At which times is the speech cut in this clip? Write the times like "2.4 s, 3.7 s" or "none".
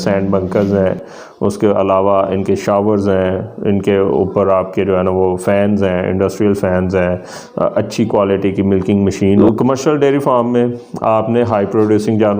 9.4 s